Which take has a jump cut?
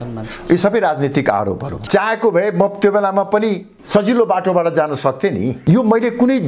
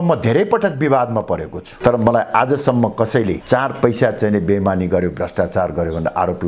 first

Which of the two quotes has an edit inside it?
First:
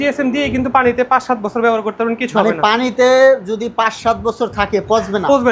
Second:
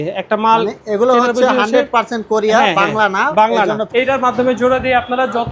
second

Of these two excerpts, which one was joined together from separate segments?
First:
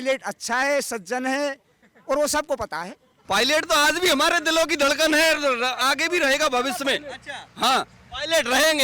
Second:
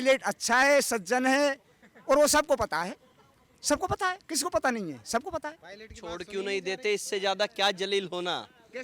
first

